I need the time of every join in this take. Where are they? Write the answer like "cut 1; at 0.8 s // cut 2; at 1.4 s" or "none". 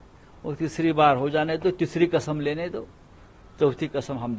none